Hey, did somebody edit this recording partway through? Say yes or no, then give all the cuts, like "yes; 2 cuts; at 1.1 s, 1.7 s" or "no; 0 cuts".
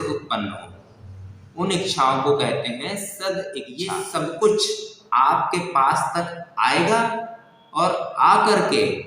yes; 1 cut; at 3.7 s